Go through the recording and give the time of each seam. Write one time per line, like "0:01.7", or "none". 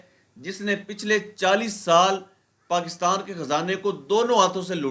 none